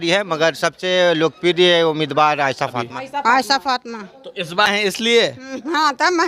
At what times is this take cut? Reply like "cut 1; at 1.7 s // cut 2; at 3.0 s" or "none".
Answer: cut 1; at 2.9 s

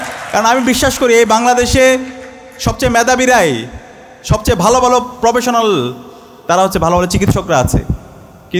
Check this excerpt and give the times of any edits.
none

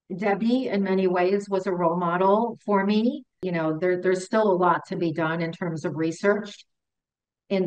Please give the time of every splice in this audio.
cut 1; at 3.4 s

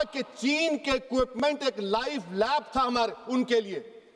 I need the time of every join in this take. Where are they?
none

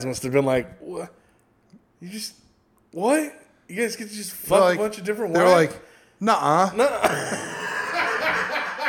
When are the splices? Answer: none

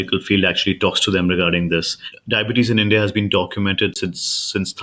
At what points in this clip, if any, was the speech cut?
cut 1; at 2.1 s

